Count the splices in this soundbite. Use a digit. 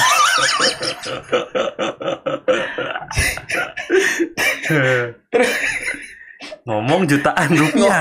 0